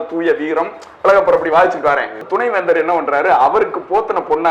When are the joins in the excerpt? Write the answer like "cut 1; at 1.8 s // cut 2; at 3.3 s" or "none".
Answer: cut 1; at 2.2 s